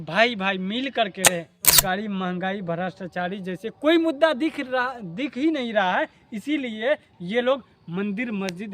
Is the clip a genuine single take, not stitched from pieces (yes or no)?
no